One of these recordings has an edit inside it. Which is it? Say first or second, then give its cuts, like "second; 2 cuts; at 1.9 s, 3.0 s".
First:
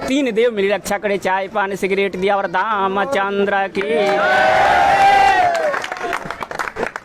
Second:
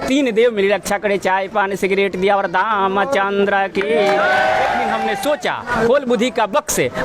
second; 1 cut; at 4.9 s